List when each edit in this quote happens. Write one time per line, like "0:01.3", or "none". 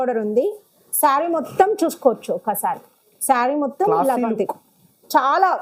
none